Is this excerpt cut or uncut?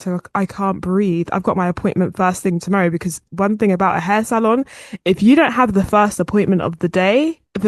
uncut